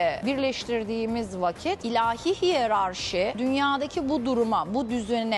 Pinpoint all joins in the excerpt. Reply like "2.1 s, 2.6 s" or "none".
none